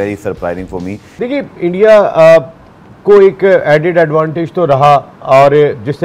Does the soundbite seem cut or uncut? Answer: cut